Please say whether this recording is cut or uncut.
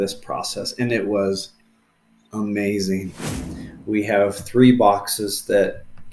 cut